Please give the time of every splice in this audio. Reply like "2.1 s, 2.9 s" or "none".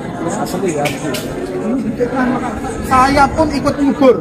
none